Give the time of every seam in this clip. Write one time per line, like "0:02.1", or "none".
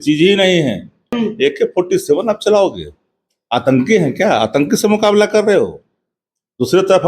0:01.2